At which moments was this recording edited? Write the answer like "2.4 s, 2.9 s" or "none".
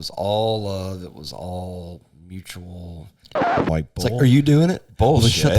3.5 s